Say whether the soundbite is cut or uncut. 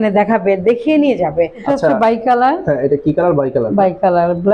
cut